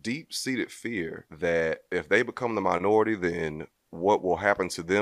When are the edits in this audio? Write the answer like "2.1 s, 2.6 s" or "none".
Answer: 1.2 s, 1.8 s

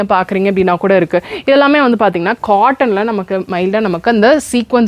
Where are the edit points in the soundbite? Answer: none

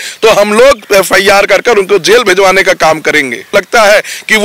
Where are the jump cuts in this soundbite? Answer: 3.5 s

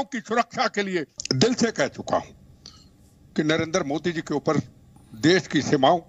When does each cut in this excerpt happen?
1.2 s

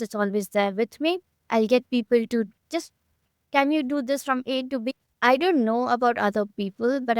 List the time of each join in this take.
4.9 s

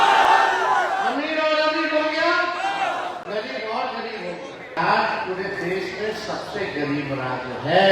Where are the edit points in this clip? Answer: 4.8 s

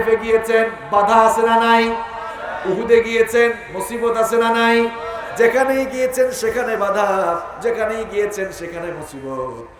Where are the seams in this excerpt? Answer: none

